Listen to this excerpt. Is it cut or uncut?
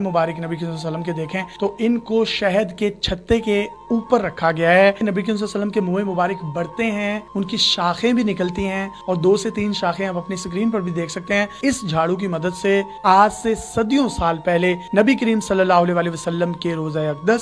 cut